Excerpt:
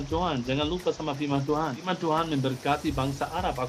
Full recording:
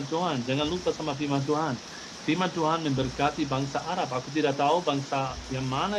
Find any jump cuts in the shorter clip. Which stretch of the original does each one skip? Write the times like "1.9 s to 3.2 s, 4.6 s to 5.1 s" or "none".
1.9 s to 2.4 s